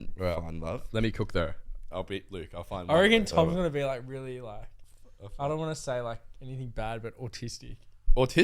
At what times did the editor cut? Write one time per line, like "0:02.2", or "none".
0:01.8

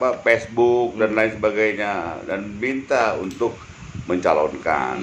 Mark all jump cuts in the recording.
none

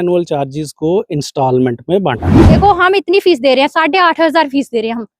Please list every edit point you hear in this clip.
0:02.6

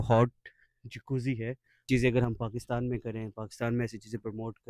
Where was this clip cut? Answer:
0:01.8

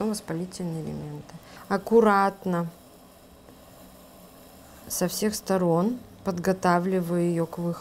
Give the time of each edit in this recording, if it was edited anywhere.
0:01.5

